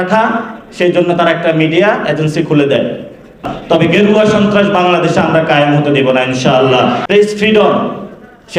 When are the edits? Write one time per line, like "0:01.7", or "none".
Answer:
0:03.5
0:07.0